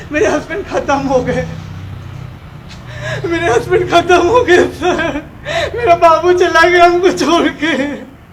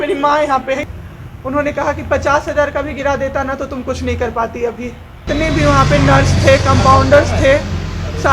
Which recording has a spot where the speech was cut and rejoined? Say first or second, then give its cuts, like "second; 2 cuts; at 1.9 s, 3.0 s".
second; 2 cuts; at 0.8 s, 5.2 s